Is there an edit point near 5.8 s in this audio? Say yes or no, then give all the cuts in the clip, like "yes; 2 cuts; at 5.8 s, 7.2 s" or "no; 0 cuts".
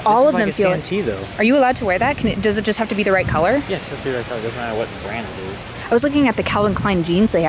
yes; 1 cut; at 5.8 s